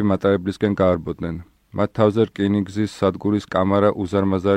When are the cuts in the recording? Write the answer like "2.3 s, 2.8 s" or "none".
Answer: 2.9 s

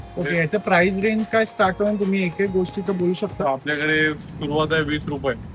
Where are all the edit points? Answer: none

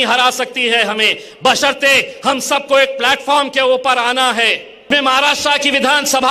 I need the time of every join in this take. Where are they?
4.9 s

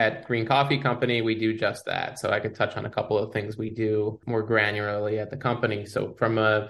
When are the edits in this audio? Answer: 4.2 s

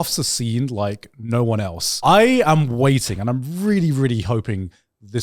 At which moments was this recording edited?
1.9 s

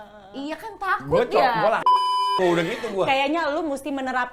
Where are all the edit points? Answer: 1.8 s

